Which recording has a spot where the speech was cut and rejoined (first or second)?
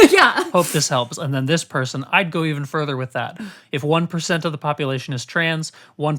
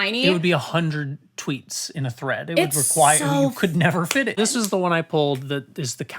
second